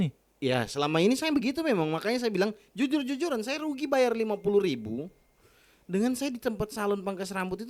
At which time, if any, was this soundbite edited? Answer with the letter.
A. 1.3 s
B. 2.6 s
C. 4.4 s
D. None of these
D